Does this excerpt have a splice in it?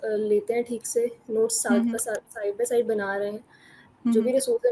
no; 0 cuts

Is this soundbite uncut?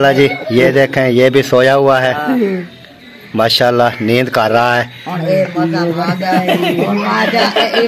yes; 0 cuts

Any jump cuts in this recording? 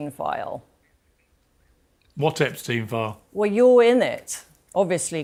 no; 0 cuts

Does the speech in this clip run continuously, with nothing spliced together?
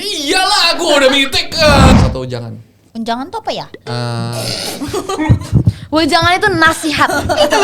no; 1 cut; at 1.9 s

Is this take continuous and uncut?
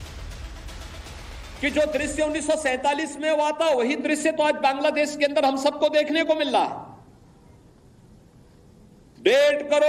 yes; 0 cuts

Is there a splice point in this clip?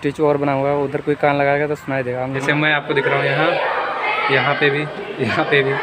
yes; 1 cut; at 2.4 s

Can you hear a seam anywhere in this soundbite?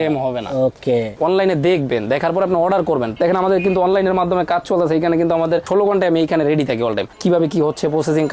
yes; 2 cuts; at 1.1 s, 3.1 s

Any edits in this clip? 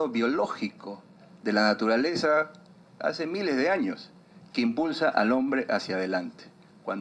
no; 0 cuts

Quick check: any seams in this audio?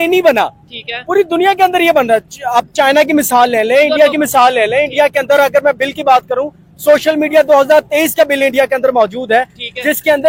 no; 0 cuts

